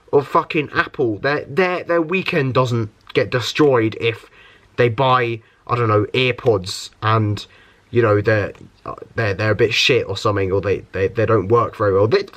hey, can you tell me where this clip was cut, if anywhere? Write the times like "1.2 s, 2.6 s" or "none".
none